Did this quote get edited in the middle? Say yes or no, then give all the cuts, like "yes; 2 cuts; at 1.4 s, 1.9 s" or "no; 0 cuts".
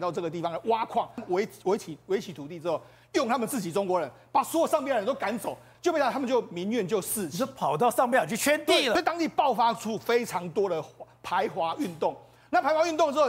yes; 3 cuts; at 1.2 s, 5.7 s, 8.9 s